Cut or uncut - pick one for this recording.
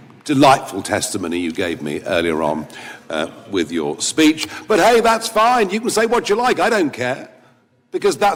uncut